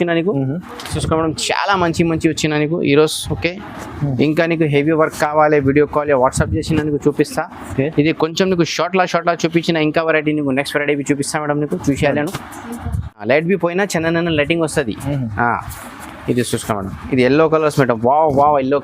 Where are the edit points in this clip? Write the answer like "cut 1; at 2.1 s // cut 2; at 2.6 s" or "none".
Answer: cut 1; at 0.9 s // cut 2; at 13.2 s